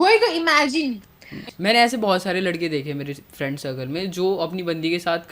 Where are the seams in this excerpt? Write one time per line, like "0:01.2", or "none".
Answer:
0:01.4